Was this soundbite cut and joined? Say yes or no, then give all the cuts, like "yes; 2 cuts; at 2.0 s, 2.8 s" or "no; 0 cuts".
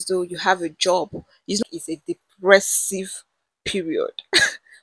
yes; 1 cut; at 1.6 s